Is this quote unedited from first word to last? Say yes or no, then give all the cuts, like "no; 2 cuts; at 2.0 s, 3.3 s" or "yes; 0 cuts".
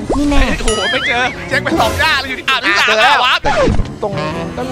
no; 1 cut; at 3.4 s